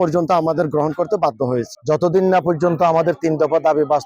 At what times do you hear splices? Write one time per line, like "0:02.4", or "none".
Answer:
0:01.7